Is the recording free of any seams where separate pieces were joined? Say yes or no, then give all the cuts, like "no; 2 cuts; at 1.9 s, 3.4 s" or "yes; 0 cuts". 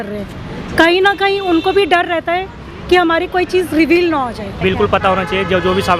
no; 1 cut; at 4.6 s